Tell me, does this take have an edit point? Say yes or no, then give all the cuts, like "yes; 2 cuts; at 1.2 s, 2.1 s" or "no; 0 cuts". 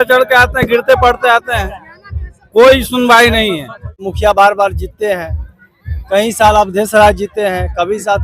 yes; 1 cut; at 4.1 s